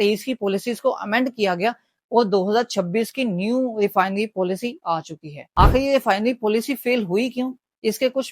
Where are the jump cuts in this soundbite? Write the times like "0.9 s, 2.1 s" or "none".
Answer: 5.4 s